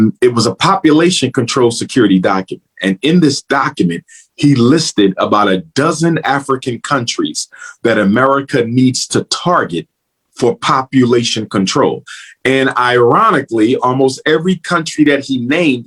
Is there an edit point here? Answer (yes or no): no